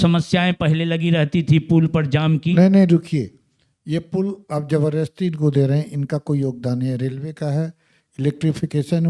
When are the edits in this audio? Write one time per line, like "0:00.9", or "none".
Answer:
none